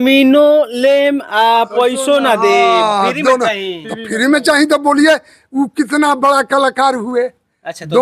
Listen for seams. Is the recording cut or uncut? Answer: uncut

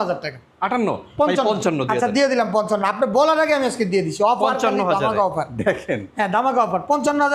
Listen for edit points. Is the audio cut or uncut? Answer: uncut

